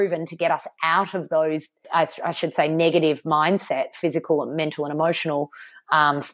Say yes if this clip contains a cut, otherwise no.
yes